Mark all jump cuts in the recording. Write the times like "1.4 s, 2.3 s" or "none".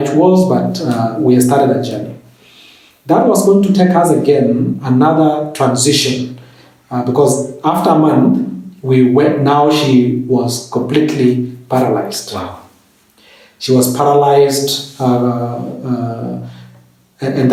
none